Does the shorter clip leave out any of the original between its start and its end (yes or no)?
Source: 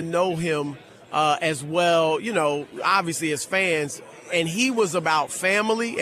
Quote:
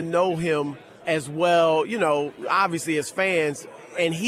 yes